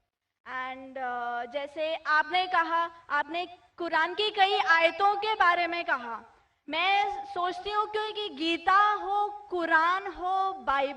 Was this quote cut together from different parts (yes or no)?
yes